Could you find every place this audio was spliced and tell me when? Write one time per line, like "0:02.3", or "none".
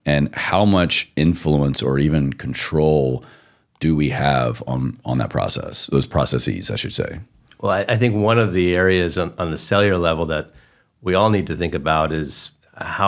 none